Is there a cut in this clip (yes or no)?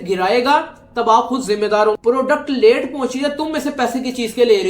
yes